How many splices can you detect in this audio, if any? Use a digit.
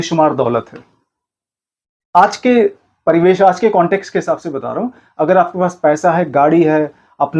0